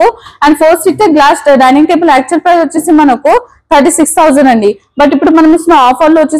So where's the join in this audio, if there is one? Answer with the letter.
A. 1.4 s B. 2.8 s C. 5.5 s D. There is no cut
D